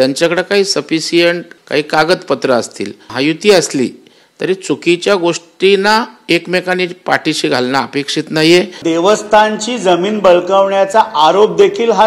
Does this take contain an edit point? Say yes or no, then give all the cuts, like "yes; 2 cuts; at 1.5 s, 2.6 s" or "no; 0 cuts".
yes; 3 cuts; at 1.5 s, 3.1 s, 8.8 s